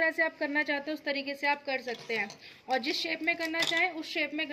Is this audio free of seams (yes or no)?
yes